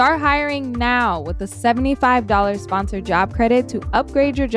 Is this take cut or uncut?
uncut